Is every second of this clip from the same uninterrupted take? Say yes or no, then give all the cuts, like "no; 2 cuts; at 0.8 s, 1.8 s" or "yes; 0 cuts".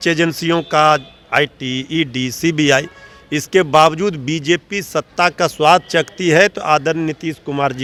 yes; 0 cuts